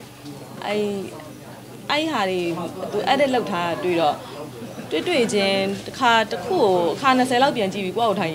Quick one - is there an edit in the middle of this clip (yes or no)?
no